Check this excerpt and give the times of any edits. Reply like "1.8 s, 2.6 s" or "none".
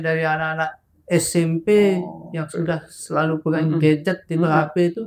none